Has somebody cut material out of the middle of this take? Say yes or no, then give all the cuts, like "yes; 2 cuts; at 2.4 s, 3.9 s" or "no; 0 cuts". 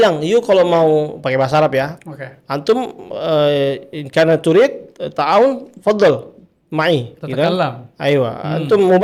no; 0 cuts